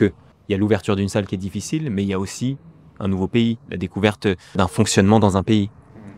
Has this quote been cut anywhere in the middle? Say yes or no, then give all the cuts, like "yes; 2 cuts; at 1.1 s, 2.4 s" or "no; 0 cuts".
no; 0 cuts